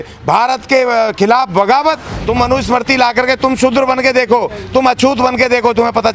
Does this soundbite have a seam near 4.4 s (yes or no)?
no